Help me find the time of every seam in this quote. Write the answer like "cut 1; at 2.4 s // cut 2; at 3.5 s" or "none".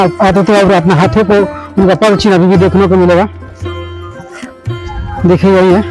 cut 1; at 3.4 s // cut 2; at 5.1 s